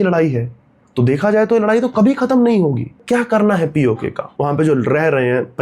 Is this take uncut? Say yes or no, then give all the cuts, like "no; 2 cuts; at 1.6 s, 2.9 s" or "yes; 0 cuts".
no; 2 cuts; at 3.0 s, 4.3 s